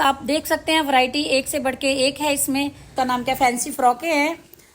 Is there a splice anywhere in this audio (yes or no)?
yes